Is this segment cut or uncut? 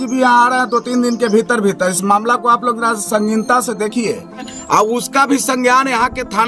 cut